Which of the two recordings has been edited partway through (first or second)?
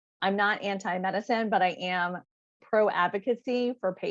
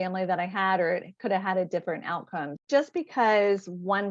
second